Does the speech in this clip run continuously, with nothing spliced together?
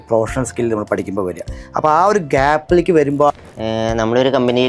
no; 1 cut; at 3.3 s

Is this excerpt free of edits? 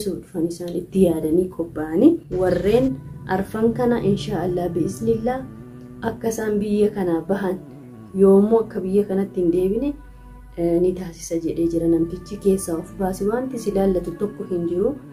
no; 1 cut; at 2.3 s

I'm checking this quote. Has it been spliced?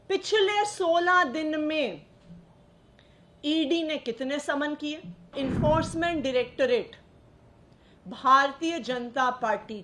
yes; 1 cut; at 5.3 s

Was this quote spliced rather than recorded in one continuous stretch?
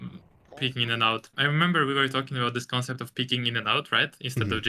yes; 1 cut; at 1.3 s

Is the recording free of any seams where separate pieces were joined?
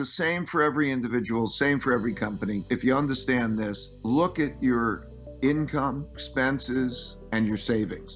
no; 4 cuts; at 2.7 s, 3.9 s, 6.2 s, 7.1 s

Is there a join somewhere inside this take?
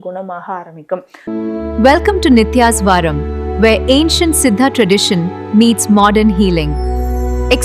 yes; 1 cut; at 1.1 s

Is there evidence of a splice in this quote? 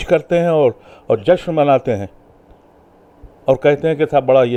no; 0 cuts

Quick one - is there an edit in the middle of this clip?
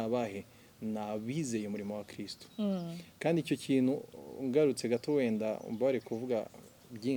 no; 0 cuts

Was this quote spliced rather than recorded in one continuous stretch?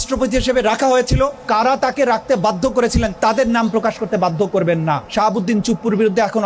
yes; 3 cuts; at 1.4 s, 3.1 s, 5.1 s

